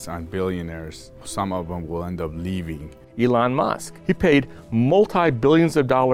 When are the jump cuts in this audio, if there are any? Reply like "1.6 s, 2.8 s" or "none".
1.3 s, 3.0 s, 3.9 s

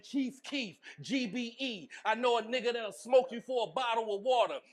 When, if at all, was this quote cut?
none

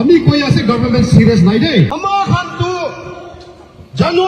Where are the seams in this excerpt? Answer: 1.9 s

